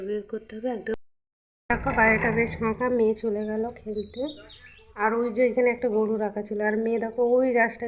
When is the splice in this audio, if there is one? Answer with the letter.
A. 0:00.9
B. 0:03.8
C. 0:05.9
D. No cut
A